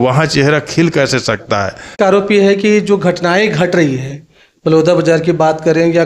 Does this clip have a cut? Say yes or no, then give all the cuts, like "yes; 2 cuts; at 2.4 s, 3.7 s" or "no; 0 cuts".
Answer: yes; 1 cut; at 1.9 s